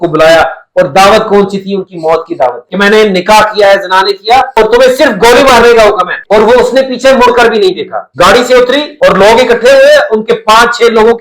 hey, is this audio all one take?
no; 2 cuts; at 2.6 s, 6.1 s

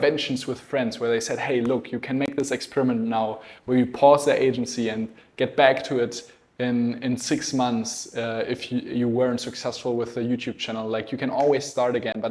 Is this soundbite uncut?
yes; 0 cuts

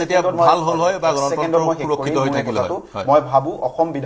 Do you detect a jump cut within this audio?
no; 0 cuts

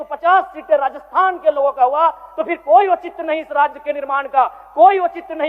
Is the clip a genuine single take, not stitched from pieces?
yes; 0 cuts

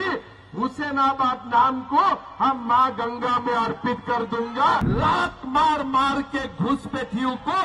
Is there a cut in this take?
yes; 1 cut; at 4.9 s

